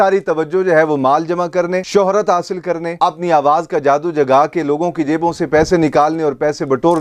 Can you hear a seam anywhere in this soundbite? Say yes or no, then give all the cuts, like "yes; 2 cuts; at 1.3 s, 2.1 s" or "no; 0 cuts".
no; 0 cuts